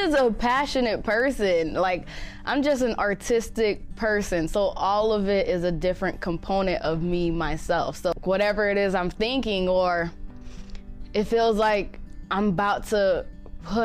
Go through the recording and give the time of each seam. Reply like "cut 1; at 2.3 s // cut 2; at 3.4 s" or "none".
cut 1; at 8.1 s